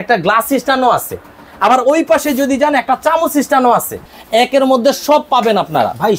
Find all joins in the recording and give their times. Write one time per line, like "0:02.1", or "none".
0:04.1